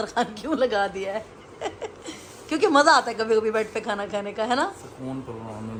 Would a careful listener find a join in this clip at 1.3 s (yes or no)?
no